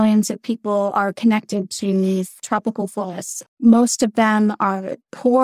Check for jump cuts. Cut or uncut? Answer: cut